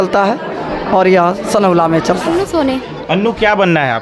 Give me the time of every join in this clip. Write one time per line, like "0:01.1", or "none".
0:02.4